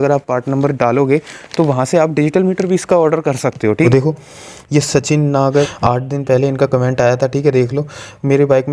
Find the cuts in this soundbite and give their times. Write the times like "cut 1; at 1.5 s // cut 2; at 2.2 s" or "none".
cut 1; at 3.8 s // cut 2; at 5.7 s